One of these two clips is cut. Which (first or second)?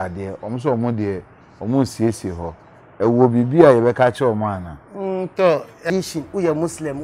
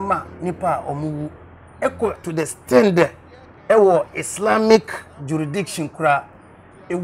first